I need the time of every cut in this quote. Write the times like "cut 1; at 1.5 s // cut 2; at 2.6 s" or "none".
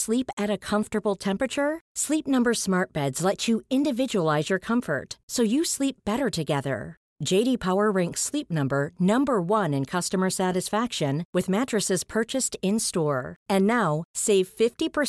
none